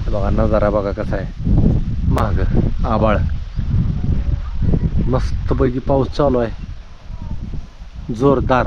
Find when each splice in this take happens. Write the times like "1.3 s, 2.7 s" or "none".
none